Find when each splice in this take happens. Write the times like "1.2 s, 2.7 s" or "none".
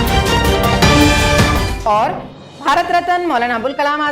1.7 s